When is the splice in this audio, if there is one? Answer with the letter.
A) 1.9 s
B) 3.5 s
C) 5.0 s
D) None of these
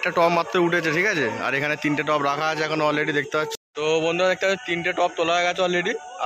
B